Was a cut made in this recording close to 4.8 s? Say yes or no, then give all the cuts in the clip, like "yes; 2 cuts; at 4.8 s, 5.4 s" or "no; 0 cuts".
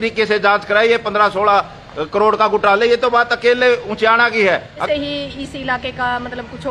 yes; 1 cut; at 4.8 s